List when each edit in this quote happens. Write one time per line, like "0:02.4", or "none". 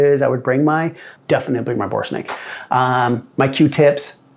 0:01.1